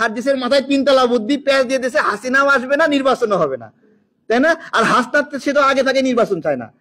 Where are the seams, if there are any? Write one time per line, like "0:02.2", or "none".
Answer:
none